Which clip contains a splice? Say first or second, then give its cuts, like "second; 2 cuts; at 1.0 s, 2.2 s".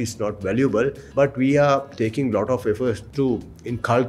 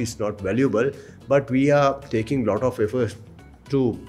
first; 2 cuts; at 1.0 s, 3.0 s